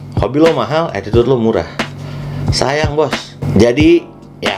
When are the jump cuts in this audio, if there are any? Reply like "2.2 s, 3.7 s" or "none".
none